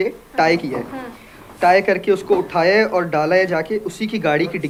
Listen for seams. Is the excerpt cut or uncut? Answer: uncut